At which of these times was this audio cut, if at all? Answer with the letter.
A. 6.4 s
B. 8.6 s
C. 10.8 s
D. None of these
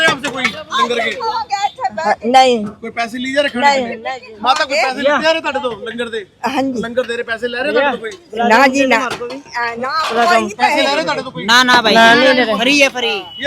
D